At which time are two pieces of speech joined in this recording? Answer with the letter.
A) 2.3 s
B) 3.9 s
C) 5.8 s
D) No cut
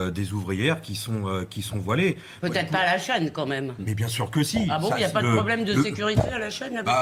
D